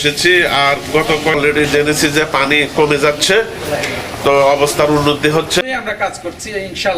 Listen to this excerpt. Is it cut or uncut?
cut